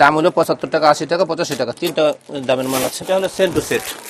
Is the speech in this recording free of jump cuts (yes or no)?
no